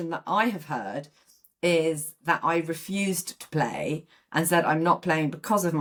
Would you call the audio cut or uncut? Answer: uncut